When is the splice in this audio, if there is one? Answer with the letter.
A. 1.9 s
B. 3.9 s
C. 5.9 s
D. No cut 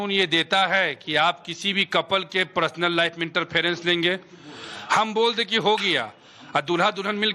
B